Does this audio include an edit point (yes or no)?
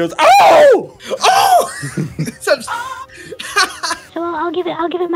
yes